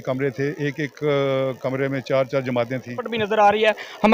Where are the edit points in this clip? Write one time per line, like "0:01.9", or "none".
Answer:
0:03.1